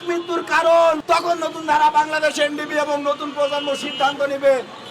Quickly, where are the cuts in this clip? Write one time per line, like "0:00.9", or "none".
0:01.0

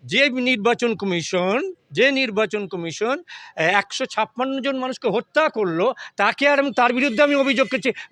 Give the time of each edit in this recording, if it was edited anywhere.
none

